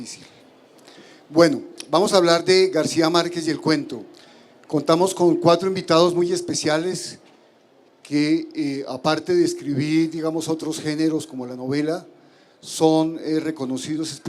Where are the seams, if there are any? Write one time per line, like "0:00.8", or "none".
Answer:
0:12.8